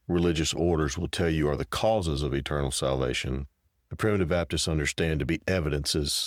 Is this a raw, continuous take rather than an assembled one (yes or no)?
yes